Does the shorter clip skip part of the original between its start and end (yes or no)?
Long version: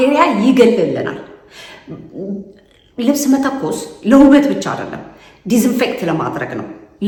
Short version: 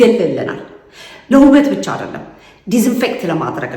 yes